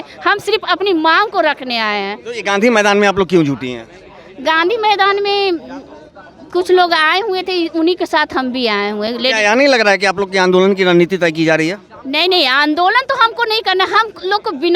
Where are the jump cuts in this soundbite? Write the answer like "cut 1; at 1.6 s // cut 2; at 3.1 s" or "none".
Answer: none